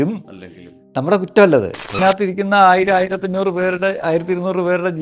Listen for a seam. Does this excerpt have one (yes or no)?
yes